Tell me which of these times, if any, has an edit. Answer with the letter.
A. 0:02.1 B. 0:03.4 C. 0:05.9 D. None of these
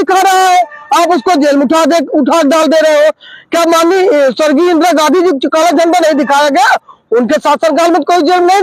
D